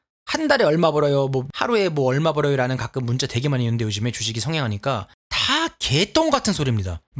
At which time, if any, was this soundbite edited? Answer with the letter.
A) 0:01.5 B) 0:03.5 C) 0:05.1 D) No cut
A